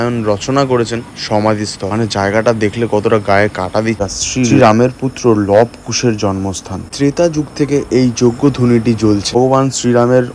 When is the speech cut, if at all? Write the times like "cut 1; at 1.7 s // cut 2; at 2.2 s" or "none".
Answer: cut 1; at 4.1 s // cut 2; at 6.8 s // cut 3; at 9.4 s